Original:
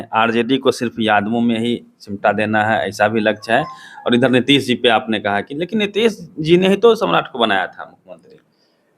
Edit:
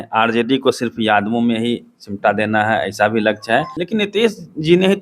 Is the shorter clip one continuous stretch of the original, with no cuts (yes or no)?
no